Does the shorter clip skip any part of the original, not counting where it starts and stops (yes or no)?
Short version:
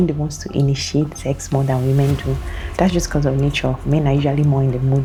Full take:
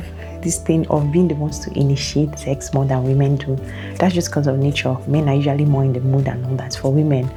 no